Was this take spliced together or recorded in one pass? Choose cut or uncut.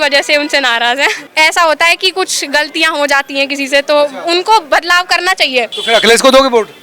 cut